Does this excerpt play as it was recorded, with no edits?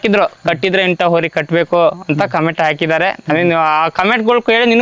yes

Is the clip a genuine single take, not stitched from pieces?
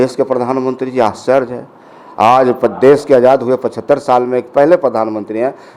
yes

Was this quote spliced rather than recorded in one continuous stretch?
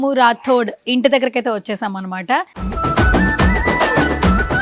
yes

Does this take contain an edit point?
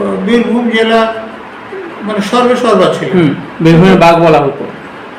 no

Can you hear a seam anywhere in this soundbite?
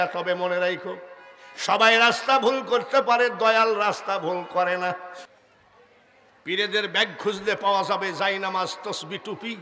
yes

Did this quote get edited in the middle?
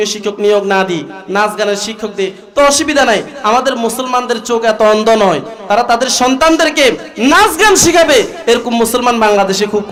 no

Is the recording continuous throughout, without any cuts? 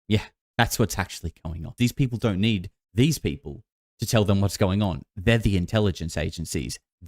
no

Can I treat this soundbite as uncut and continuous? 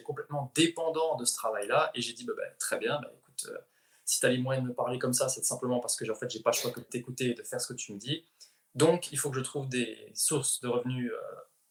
yes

